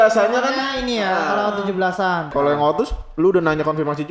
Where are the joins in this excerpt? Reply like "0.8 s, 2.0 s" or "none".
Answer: 2.3 s